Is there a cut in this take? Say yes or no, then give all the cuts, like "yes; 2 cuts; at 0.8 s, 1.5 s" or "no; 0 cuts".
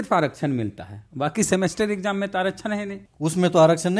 yes; 1 cut; at 3.0 s